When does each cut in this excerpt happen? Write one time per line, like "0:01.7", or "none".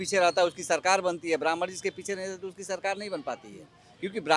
none